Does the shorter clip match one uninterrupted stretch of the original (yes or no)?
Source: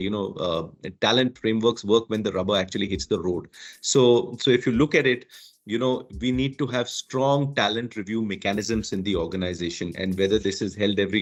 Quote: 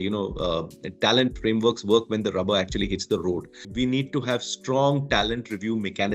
no